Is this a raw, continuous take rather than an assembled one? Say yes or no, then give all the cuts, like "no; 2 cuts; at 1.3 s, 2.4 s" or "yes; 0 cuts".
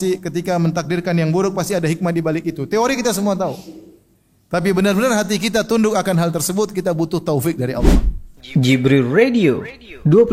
no; 1 cut; at 7.8 s